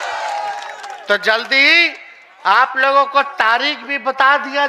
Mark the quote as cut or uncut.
uncut